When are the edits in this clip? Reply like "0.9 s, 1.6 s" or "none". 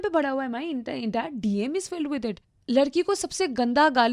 2.5 s